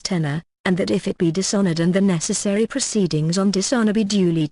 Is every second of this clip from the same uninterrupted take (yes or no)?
yes